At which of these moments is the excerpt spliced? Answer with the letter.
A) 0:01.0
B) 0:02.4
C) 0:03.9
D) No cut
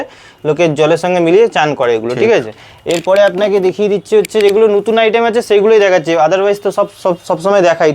D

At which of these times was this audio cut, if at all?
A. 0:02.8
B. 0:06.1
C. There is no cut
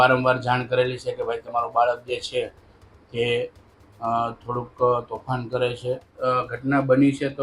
B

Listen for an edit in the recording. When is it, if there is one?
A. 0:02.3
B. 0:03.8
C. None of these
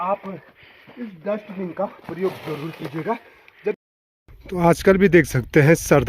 B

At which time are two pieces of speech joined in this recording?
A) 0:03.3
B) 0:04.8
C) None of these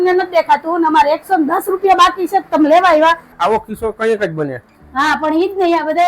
A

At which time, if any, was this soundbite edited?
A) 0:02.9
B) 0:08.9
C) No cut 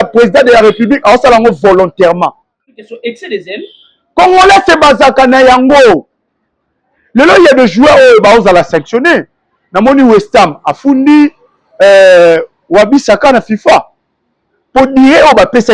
A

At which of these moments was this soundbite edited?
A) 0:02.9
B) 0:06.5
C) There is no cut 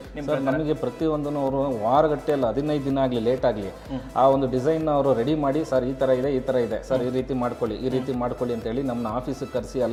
C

